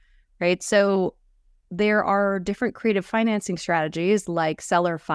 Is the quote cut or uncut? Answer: uncut